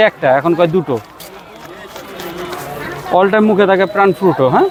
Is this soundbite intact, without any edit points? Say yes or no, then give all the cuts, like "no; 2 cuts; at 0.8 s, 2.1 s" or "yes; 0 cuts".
yes; 0 cuts